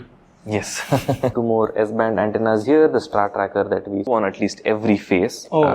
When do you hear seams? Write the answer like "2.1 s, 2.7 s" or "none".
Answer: 1.3 s, 4.1 s